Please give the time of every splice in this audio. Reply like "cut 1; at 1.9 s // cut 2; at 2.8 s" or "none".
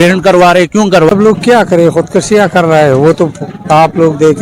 cut 1; at 1.1 s